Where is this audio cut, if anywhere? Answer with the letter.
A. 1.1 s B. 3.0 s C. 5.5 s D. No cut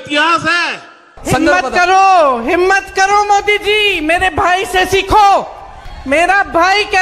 A